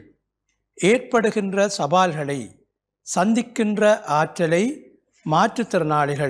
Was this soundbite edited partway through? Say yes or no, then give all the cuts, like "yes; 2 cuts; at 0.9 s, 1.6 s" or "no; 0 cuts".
no; 0 cuts